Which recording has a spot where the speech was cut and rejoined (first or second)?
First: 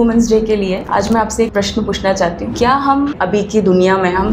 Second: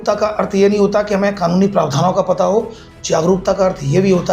first